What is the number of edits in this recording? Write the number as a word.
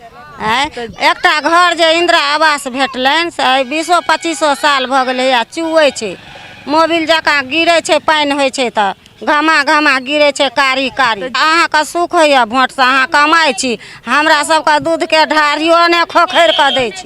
one